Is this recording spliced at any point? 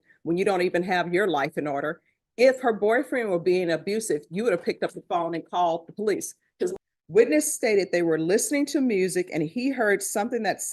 yes; 1 cut; at 6.7 s

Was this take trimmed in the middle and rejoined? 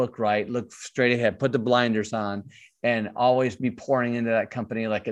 no; 0 cuts

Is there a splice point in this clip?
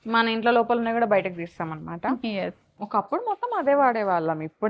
yes; 1 cut; at 2.8 s

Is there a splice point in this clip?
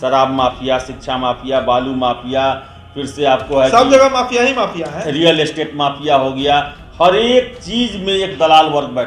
no; 0 cuts

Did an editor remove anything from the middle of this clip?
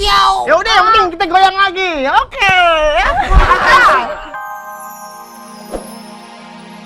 yes; 1 cut; at 4.2 s

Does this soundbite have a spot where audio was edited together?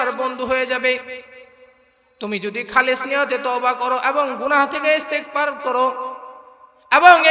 no; 0 cuts

